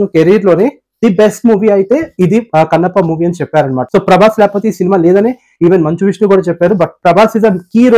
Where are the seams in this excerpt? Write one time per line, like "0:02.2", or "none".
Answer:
0:03.8